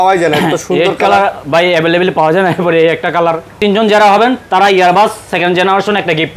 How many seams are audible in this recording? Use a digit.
1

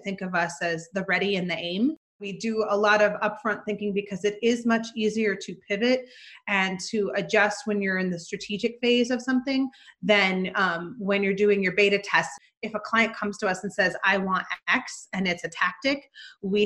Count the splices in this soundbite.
2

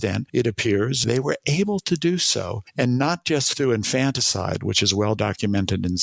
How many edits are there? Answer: 2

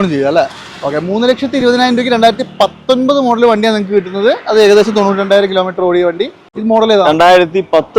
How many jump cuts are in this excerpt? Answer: 1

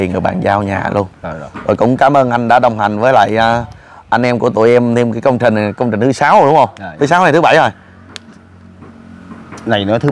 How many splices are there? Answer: 0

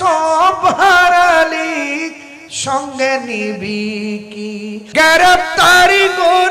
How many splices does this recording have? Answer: 1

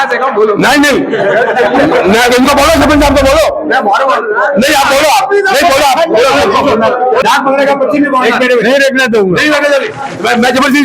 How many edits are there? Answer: 1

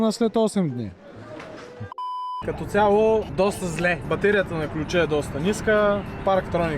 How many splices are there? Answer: 2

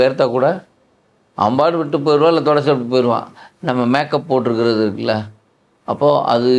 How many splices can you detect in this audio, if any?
0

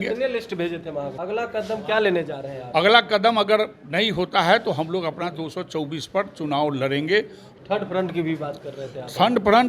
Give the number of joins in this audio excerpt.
2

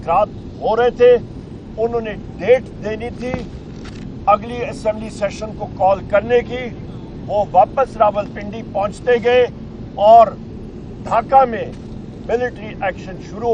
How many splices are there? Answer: 0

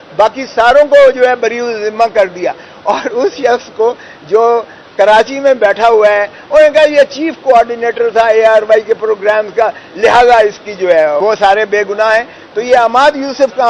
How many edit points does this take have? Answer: 1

